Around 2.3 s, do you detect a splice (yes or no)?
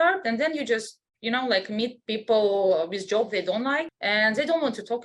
no